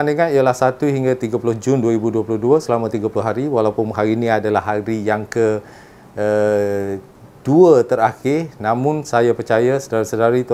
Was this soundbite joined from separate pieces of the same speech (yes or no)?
no